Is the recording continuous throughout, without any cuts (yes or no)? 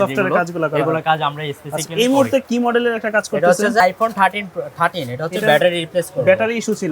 no